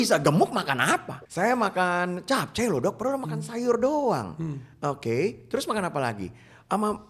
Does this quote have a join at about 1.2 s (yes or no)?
yes